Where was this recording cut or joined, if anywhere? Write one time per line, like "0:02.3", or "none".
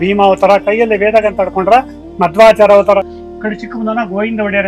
0:03.2